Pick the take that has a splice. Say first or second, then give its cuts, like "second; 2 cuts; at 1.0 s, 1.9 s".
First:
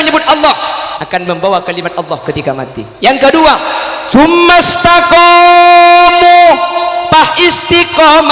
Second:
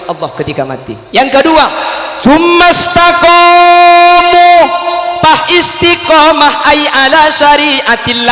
first; 1 cut; at 1.0 s